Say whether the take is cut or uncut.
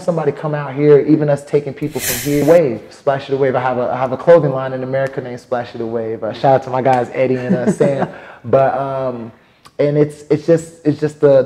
cut